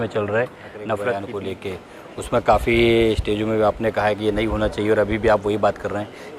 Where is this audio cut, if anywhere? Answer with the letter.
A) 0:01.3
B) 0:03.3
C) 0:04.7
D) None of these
A